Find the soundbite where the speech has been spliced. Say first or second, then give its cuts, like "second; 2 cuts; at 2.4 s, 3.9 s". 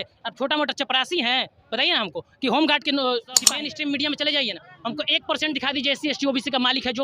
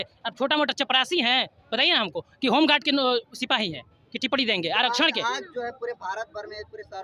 first; 1 cut; at 3.5 s